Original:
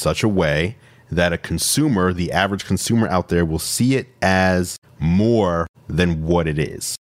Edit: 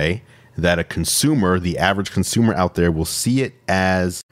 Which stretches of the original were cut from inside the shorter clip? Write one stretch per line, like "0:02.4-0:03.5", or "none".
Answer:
none